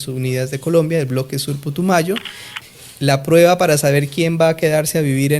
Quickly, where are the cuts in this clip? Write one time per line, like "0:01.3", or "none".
0:02.5

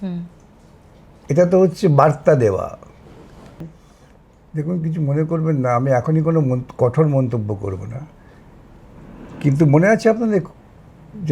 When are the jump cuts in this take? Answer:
0:03.6

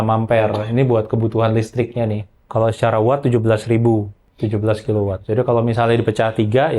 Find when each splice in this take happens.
0:02.3
0:04.2
0:05.2

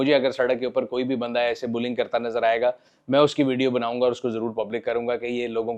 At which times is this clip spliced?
none

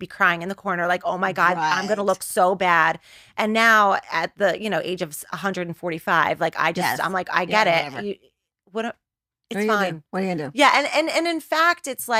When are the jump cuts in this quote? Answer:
none

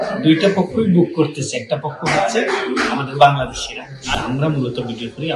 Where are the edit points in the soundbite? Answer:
0:04.1

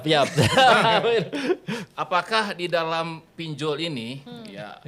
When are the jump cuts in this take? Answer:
none

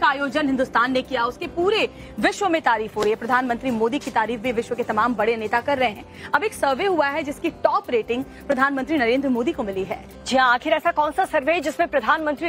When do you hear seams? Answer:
0:02.6

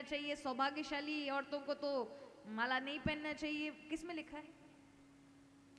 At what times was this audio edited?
none

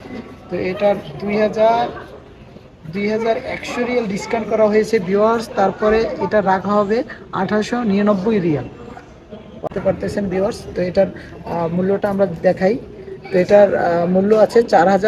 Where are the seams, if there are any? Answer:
0:09.7

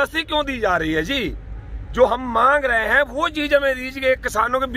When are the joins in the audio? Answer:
none

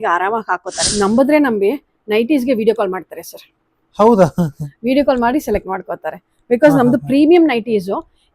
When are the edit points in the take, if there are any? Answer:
0:01.0

